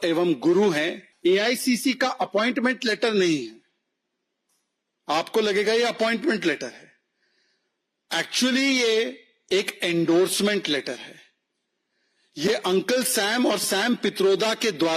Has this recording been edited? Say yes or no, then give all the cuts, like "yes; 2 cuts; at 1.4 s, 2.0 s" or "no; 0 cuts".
yes; 1 cut; at 1.0 s